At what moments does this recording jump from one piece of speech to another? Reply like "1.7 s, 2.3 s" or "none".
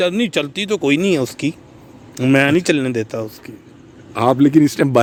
none